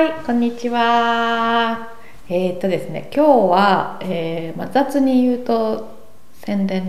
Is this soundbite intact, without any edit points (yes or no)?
yes